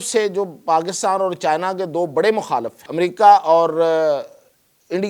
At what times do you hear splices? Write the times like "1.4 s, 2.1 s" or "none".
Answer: 2.8 s